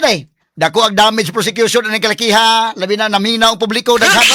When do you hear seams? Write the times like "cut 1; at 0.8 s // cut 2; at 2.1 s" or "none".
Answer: none